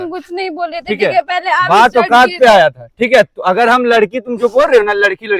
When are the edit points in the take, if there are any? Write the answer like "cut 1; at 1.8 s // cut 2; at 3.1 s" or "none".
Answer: none